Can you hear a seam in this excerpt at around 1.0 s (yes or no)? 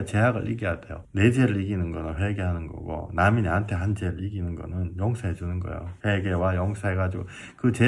yes